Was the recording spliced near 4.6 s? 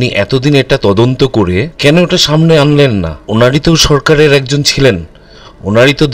no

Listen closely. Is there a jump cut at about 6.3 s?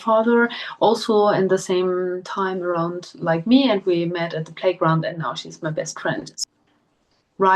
yes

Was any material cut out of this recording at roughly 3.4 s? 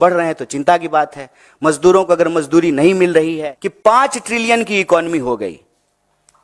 yes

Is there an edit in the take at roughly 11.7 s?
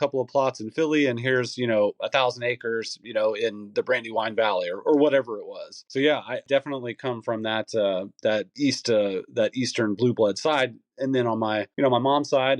yes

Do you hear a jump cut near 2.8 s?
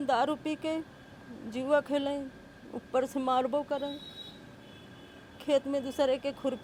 no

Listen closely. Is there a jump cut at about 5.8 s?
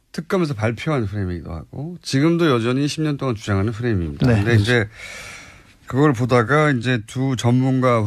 yes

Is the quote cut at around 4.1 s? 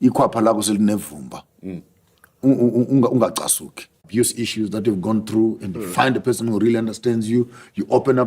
yes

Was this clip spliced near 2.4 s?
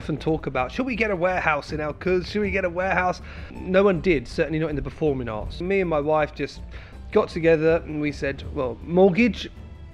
no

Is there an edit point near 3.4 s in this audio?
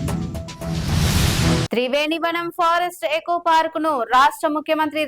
no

